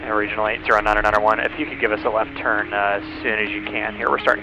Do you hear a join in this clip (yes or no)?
no